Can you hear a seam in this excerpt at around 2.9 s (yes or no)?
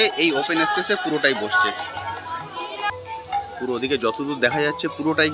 yes